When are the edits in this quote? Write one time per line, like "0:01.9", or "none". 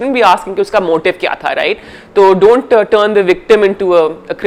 none